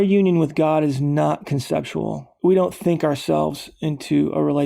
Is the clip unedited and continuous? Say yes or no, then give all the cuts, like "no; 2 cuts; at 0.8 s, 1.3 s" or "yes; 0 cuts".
no; 1 cut; at 2.2 s